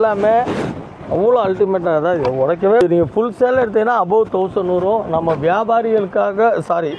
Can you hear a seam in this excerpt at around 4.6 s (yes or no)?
no